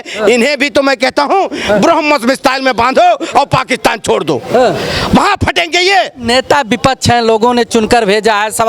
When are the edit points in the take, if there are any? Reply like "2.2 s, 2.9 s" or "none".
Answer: none